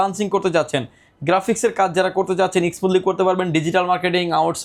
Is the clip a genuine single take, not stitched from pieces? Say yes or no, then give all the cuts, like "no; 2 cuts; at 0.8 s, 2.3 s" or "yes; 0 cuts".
yes; 0 cuts